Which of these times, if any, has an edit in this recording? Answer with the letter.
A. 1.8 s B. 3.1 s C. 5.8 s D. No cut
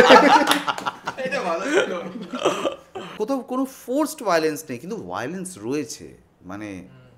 B